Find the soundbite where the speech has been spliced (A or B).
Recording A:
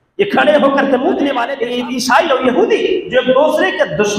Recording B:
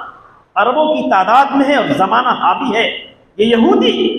A